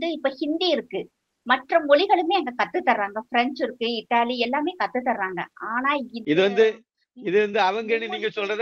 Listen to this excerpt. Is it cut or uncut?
uncut